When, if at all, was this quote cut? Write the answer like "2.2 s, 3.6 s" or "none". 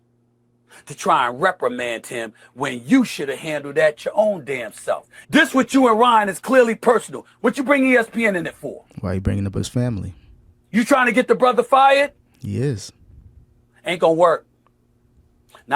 5.1 s